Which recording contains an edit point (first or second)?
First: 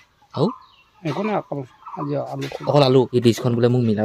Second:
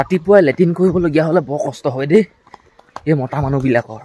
first